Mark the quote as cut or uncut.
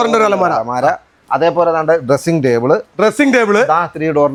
uncut